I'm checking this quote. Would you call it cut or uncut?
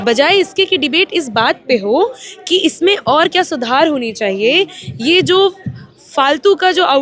uncut